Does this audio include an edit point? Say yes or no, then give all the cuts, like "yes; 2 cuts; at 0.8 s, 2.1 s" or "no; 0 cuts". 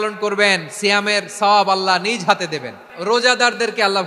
yes; 1 cut; at 2.9 s